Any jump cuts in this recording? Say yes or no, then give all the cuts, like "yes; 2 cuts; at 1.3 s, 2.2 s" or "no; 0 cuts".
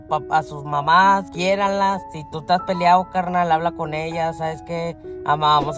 yes; 1 cut; at 1.8 s